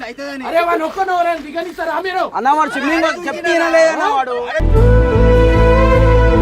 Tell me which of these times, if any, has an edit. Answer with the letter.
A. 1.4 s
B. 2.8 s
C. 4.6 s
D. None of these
C